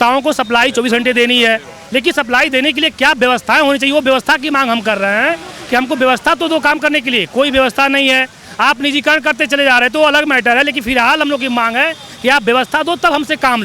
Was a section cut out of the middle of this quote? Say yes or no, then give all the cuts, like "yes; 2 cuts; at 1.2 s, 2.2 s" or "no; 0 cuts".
no; 0 cuts